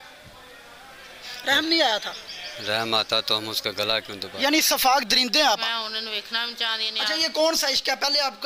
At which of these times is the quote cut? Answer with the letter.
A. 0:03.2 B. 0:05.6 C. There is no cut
B